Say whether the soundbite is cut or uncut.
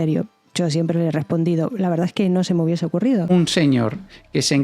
cut